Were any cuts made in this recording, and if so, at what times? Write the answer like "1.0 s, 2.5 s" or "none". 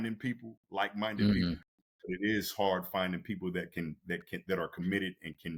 none